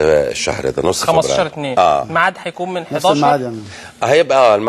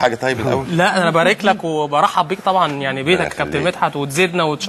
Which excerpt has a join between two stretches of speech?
second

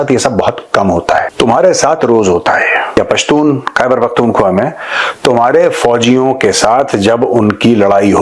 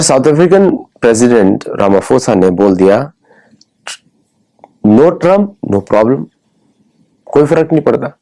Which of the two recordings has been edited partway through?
first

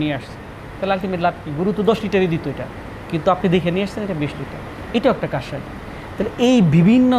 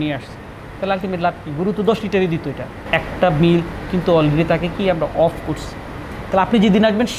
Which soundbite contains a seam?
second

